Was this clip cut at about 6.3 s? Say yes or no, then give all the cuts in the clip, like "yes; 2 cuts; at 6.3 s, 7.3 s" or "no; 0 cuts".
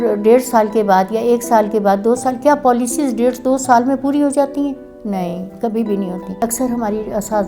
yes; 1 cut; at 6.3 s